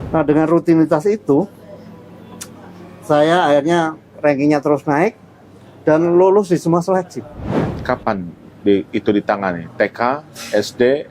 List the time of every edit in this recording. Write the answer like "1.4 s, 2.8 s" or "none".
7.5 s

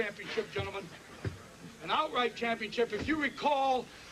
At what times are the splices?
none

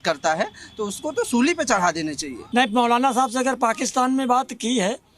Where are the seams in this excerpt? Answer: 2.4 s

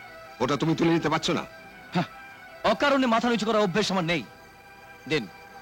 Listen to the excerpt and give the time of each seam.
none

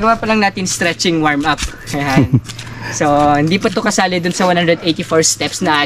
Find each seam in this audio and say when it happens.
none

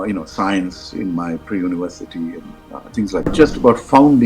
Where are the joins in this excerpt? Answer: 3.3 s

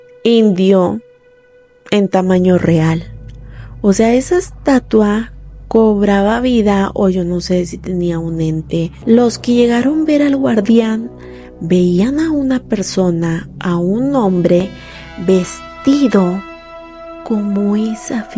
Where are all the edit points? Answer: 8.9 s

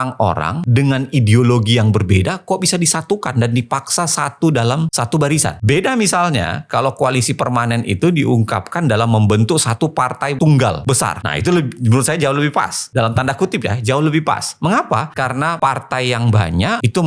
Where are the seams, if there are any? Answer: none

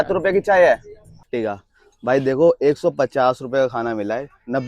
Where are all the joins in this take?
1.3 s

